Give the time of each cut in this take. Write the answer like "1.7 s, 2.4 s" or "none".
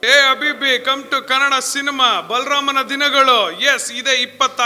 none